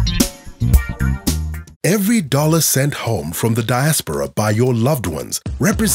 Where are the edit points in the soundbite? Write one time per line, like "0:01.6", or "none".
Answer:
0:01.6